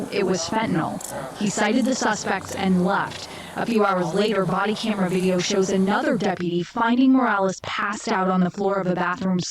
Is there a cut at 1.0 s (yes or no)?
yes